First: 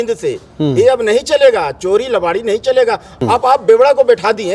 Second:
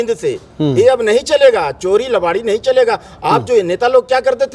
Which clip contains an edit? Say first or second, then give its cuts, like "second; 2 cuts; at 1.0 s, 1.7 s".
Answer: first; 1 cut; at 3.2 s